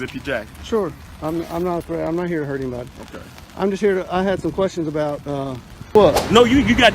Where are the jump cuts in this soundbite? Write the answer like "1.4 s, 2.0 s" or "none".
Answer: 5.9 s

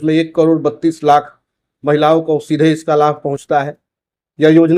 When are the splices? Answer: none

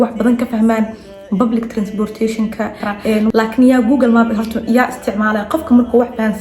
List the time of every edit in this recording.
3.3 s

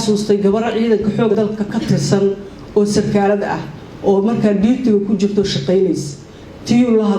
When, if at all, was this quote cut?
1.3 s

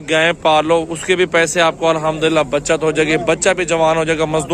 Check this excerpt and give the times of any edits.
none

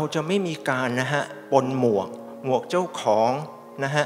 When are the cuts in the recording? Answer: none

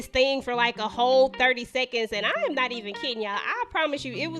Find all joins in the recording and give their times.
none

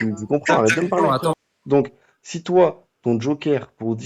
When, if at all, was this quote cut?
1.4 s

